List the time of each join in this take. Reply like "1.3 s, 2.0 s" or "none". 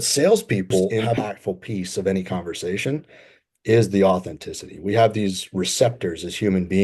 1.0 s